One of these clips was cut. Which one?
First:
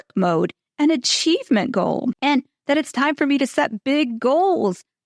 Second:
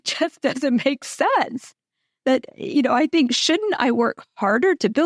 first; 1 cut; at 2.2 s

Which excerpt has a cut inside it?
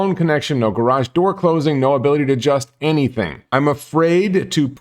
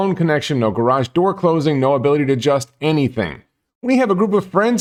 first; 1 cut; at 3.5 s

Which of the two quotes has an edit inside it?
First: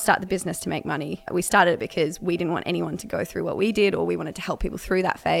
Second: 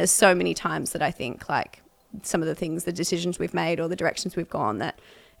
first; 1 cut; at 1.3 s

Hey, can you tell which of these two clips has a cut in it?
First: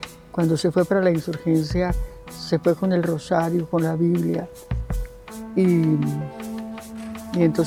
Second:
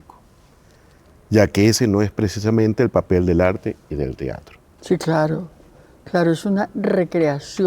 second; 1 cut; at 4.7 s

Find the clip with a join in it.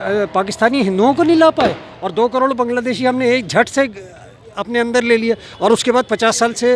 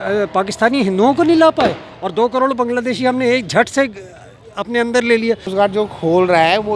second; 1 cut; at 5.5 s

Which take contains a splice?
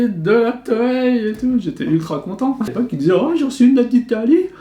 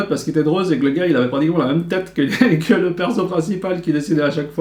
first; 1 cut; at 2.7 s

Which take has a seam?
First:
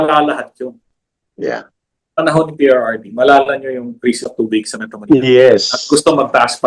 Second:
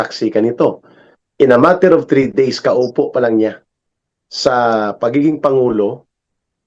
first; 1 cut; at 2.2 s

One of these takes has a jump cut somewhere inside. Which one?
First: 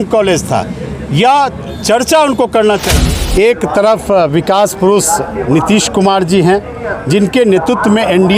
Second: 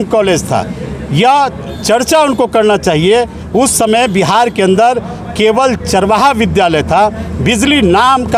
first; 1 cut; at 2.9 s

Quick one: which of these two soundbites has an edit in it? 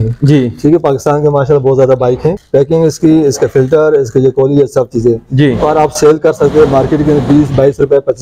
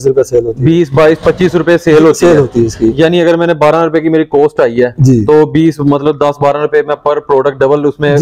first; 1 cut; at 2.4 s

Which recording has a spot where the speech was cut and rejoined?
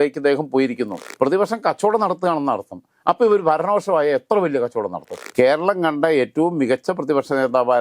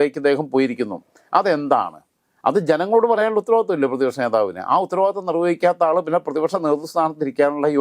first; 2 cuts; at 1.0 s, 5.2 s

